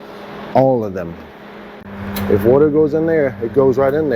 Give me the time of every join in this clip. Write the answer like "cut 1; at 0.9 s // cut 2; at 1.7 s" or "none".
cut 1; at 1.7 s